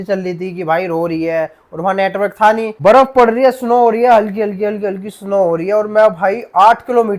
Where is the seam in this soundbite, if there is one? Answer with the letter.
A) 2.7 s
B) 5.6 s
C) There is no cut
A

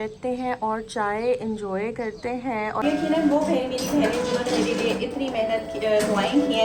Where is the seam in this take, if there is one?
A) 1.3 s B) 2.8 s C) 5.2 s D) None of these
B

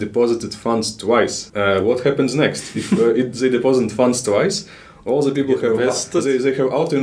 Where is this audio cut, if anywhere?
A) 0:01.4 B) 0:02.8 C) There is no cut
A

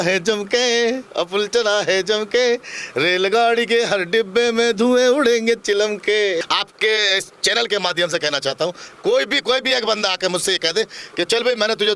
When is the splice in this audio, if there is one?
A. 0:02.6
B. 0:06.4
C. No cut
B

